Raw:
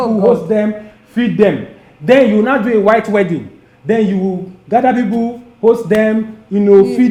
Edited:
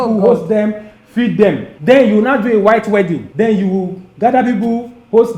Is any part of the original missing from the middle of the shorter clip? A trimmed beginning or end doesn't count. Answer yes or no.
yes